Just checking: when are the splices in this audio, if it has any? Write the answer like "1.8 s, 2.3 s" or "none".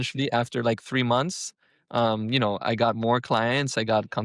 none